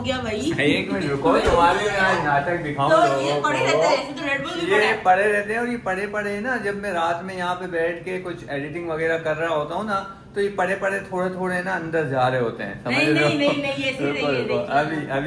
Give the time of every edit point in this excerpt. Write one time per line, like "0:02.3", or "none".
none